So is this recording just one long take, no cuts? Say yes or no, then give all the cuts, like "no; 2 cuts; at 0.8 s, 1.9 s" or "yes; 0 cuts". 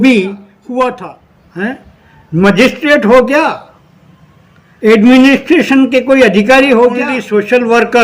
no; 2 cuts; at 1.0 s, 7.2 s